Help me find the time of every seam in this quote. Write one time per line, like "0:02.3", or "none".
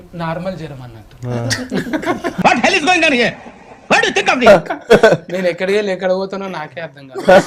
none